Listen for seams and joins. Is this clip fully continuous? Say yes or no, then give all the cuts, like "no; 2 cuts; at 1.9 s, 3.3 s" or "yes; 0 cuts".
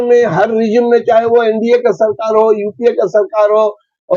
yes; 0 cuts